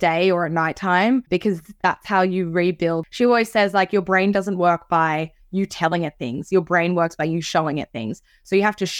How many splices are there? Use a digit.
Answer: 1